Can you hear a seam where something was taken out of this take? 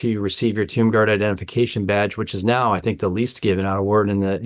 no; 0 cuts

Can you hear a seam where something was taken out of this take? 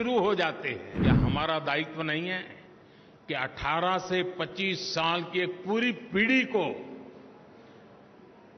yes; 1 cut; at 0.9 s

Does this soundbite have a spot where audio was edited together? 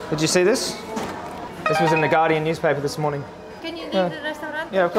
yes; 2 cuts; at 1.4 s, 3.6 s

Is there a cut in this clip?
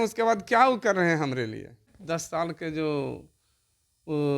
yes; 1 cut; at 1.9 s

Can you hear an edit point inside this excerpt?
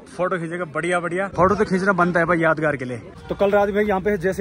yes; 2 cuts; at 1.3 s, 3.2 s

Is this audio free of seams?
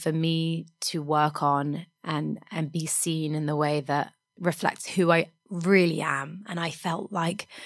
no; 1 cut; at 4.2 s

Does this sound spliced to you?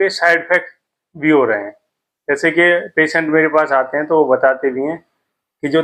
no; 0 cuts

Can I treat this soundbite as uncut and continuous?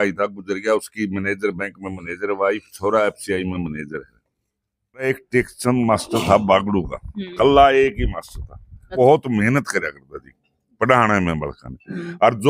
no; 2 cuts; at 5.1 s, 8.9 s

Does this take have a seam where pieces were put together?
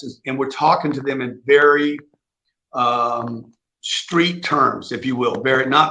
no; 0 cuts

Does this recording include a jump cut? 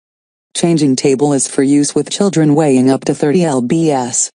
yes; 1 cut; at 3.4 s

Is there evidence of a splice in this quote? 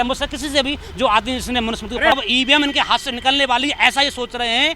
yes; 1 cut; at 2.1 s

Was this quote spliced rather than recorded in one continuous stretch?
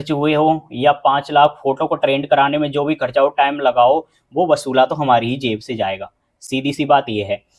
no; 0 cuts

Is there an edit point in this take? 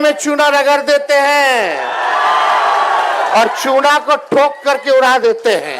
no; 0 cuts

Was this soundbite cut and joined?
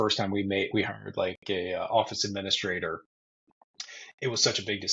no; 0 cuts

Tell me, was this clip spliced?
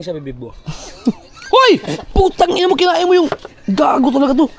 no; 0 cuts

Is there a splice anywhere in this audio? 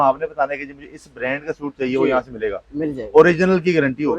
no; 0 cuts

